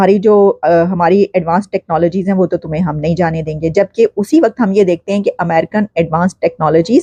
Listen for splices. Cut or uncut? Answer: uncut